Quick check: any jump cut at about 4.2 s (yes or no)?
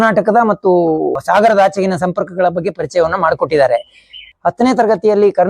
yes